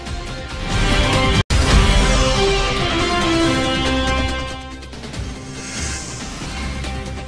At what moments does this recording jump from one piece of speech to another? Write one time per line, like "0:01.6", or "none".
none